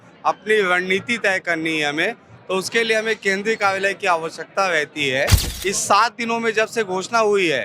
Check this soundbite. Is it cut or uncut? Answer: cut